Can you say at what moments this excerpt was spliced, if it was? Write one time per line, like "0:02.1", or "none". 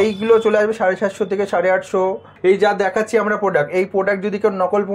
0:02.3